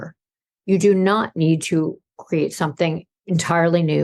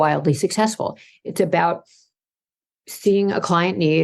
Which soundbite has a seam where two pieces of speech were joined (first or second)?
first